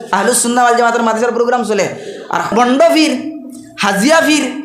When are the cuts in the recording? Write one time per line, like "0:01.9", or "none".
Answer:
0:02.5